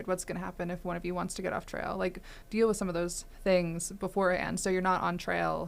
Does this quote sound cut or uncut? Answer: cut